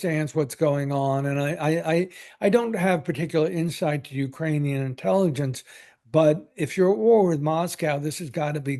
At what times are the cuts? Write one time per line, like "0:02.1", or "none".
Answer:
none